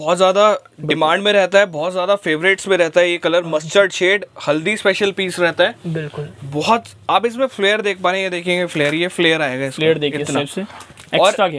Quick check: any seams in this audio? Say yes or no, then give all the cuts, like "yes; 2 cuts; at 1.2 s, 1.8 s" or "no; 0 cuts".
no; 0 cuts